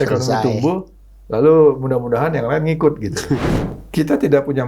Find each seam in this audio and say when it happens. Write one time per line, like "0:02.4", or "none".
0:03.6